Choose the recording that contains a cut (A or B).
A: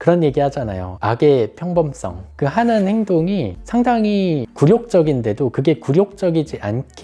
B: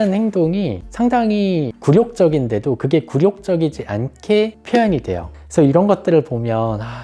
B